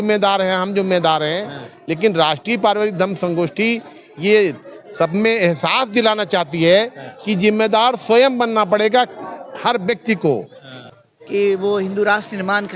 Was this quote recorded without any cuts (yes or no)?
no